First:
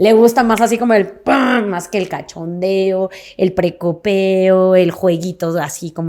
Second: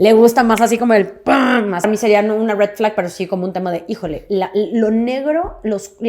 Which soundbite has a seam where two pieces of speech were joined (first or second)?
second